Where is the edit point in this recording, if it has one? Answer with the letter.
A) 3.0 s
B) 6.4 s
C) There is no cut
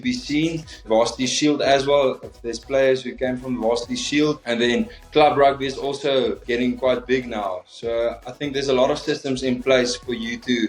C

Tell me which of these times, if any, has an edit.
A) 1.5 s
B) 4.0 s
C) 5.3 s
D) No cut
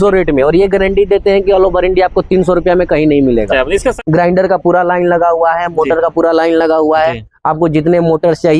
B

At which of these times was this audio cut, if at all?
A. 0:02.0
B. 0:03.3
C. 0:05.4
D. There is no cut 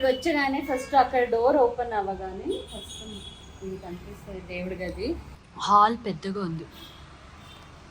C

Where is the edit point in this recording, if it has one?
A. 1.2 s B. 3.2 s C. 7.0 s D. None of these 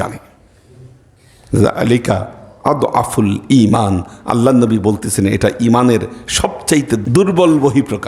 C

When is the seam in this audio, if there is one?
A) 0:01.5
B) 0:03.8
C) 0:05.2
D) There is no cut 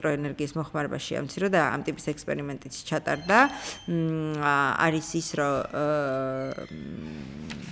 D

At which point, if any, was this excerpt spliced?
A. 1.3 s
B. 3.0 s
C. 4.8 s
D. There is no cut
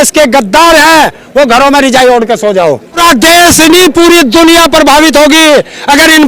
B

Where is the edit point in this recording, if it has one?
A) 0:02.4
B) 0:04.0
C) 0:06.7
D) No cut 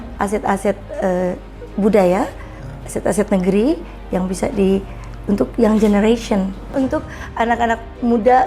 C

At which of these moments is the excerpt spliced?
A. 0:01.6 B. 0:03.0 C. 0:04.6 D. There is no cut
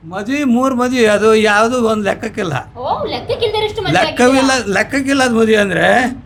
D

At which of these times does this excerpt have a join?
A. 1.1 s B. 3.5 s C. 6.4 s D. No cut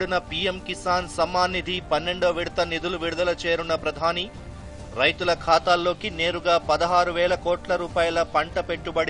D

